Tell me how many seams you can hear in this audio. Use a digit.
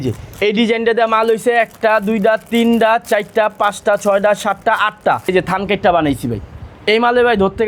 1